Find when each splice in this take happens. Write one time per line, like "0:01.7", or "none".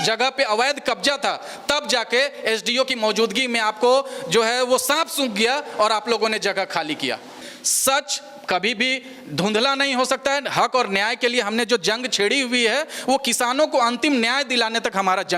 none